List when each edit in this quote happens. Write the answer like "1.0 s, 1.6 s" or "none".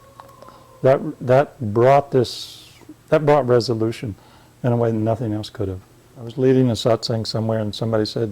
6.2 s